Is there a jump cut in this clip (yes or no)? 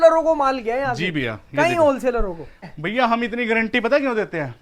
yes